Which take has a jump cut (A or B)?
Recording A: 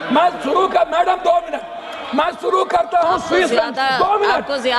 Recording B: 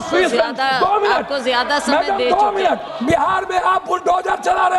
B